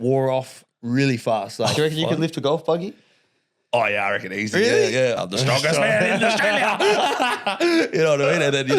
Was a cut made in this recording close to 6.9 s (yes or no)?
no